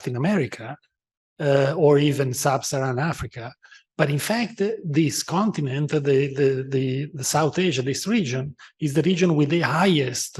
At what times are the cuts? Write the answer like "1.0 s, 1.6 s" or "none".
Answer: none